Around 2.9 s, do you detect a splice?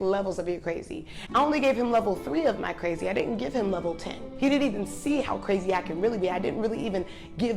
no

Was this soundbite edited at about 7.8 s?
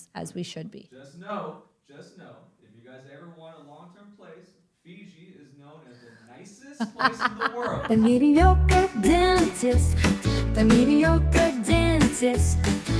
yes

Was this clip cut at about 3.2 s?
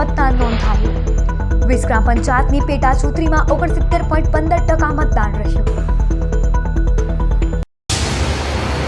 no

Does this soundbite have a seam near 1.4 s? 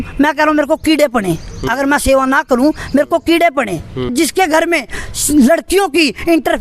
no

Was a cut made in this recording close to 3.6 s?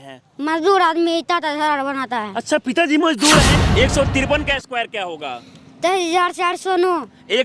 yes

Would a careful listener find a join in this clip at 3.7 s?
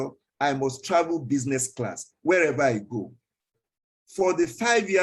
no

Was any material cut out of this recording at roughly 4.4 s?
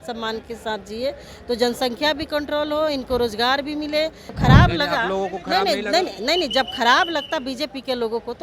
yes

